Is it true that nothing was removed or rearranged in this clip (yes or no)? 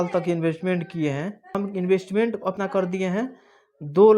no